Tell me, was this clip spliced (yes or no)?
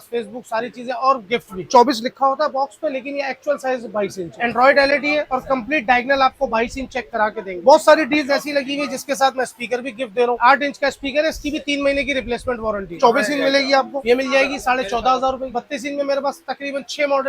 yes